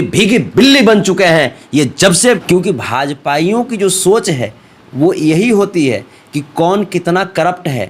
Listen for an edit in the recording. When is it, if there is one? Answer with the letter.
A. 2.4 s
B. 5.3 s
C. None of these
A